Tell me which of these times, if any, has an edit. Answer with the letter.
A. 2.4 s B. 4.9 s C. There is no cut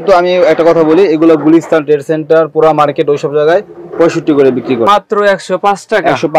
B